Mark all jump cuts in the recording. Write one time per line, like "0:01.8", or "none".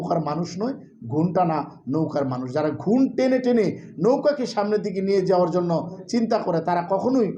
none